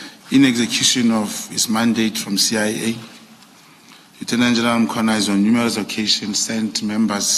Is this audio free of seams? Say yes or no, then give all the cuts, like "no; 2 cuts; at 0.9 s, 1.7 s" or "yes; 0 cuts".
yes; 0 cuts